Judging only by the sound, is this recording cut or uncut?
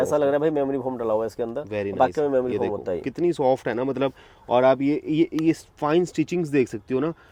uncut